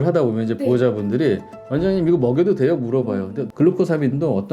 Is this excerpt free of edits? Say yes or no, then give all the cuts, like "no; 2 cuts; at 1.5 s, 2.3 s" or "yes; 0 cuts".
no; 2 cuts; at 1.6 s, 3.4 s